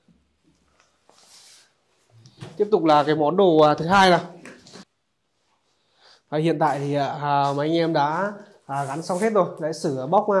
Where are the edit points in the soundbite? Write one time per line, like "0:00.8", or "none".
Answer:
0:04.9

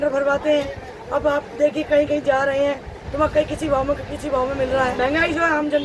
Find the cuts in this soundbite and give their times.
0:04.9

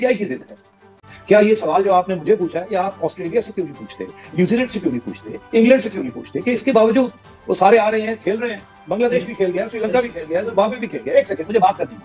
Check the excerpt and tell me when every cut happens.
0:01.1

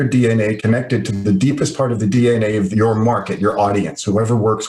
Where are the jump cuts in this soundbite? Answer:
0:02.7

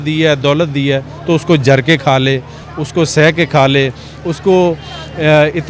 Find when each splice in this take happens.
none

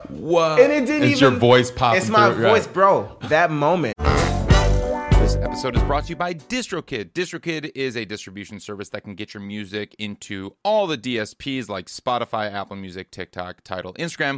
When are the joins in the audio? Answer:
0:03.1
0:04.0

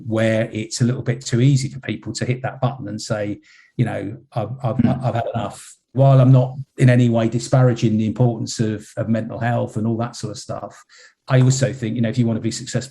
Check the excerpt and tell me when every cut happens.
0:05.9
0:11.1

